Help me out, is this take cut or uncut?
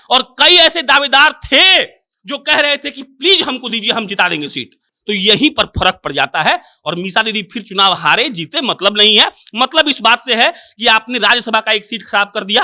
uncut